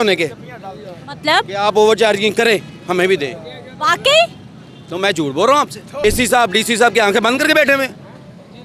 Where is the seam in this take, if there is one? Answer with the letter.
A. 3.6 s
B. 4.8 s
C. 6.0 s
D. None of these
C